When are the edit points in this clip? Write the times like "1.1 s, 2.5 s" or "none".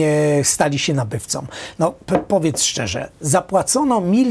none